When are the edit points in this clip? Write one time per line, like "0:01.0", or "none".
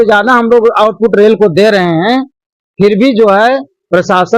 none